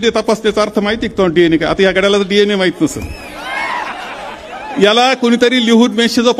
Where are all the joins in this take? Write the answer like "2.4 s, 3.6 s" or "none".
none

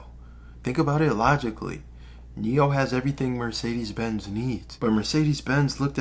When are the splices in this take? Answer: 4.7 s

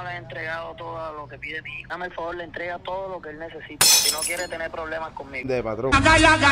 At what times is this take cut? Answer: 1.9 s, 5.4 s

